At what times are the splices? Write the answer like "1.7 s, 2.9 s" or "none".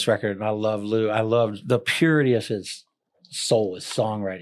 1.6 s